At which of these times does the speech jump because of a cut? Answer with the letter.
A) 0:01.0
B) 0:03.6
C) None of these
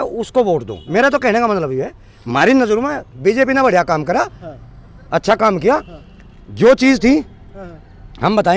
C